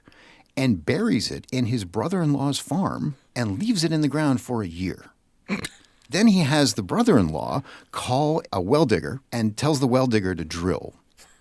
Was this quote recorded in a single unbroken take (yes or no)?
no